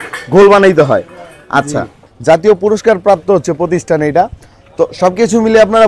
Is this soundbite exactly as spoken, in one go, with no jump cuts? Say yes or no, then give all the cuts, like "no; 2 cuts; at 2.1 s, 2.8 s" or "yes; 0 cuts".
no; 1 cut; at 2.0 s